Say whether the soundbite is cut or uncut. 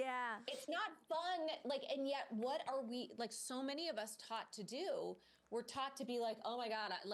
uncut